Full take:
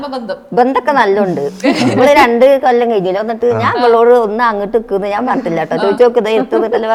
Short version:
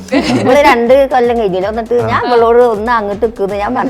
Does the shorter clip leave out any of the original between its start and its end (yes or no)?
no